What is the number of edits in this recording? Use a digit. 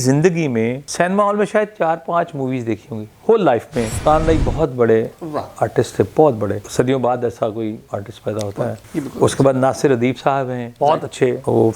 2